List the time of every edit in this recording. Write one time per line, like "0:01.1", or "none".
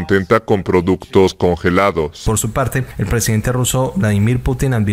0:02.2